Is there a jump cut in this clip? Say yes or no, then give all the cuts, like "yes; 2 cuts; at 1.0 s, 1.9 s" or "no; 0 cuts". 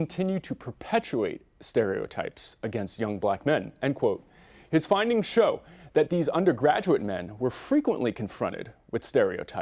yes; 1 cut; at 2.8 s